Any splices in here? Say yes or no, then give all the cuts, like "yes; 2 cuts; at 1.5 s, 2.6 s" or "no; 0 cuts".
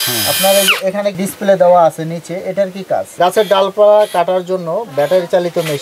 yes; 1 cut; at 3.1 s